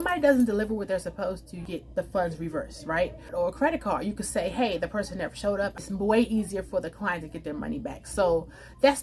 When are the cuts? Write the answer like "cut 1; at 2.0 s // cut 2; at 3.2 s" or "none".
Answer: cut 1; at 1.6 s // cut 2; at 3.2 s // cut 3; at 5.7 s

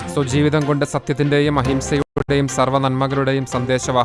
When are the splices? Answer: none

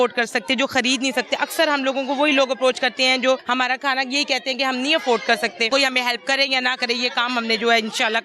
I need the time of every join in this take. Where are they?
cut 1; at 3.4 s // cut 2; at 5.7 s

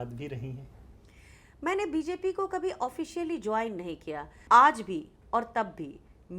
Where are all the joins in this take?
cut 1; at 4.3 s

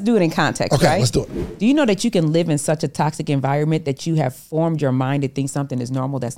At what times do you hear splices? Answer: cut 1; at 1.4 s

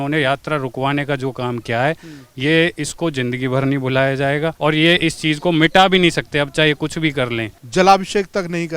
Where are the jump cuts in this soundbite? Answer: cut 1; at 4.5 s // cut 2; at 7.5 s

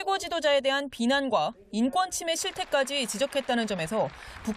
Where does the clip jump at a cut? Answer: cut 1; at 1.2 s

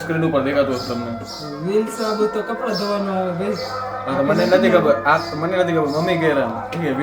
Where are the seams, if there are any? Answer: none

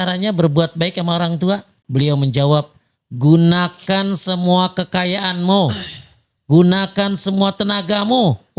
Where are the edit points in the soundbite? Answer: cut 1; at 1.8 s

